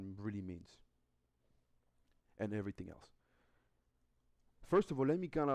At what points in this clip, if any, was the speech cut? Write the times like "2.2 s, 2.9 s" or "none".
2.7 s